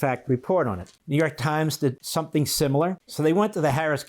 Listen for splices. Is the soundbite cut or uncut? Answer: cut